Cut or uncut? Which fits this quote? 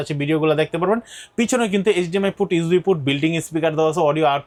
uncut